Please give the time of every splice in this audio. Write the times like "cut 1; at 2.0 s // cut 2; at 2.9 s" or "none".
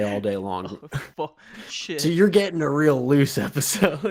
none